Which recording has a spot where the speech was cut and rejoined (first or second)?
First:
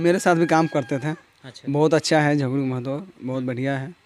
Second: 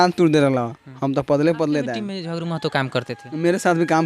second